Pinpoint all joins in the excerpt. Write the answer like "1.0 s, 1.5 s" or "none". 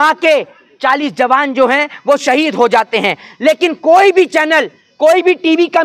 none

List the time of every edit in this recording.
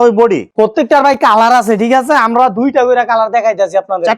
none

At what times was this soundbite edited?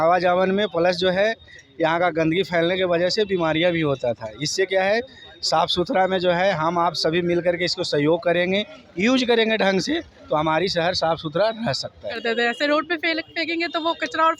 12.2 s

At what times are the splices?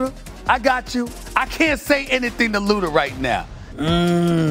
3.6 s

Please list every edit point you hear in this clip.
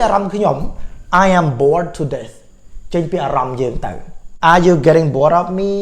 4.2 s

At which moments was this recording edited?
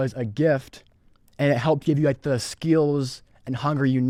none

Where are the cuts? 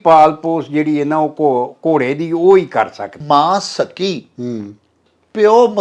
3.2 s

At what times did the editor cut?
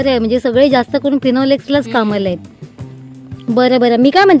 none

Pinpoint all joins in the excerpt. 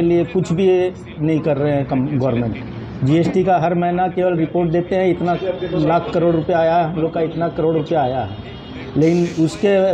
none

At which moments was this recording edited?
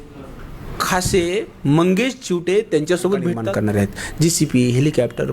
3.4 s

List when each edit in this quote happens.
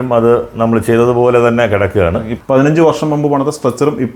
2.3 s

